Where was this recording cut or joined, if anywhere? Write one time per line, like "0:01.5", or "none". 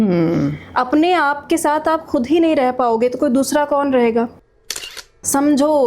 0:04.7